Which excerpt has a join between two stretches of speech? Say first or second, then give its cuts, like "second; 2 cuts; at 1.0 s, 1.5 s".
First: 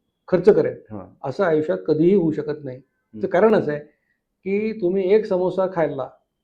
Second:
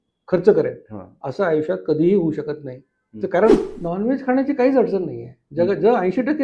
second; 1 cut; at 3.5 s